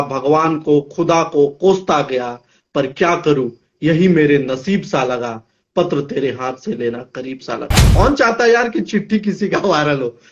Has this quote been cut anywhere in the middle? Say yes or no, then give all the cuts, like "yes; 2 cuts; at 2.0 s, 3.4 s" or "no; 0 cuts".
yes; 1 cut; at 7.8 s